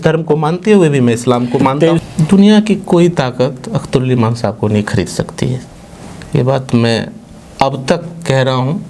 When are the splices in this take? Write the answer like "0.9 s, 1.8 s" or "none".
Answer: 2.0 s